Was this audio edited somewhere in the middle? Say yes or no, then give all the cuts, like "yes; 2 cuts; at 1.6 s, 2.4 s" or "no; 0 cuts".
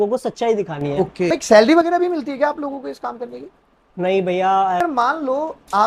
yes; 2 cuts; at 1.3 s, 4.8 s